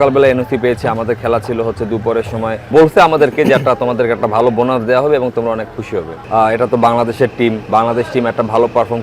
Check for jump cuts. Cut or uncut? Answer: cut